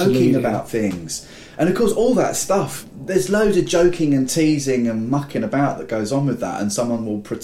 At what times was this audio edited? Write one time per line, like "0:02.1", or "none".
none